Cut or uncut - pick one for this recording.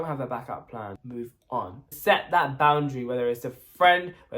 cut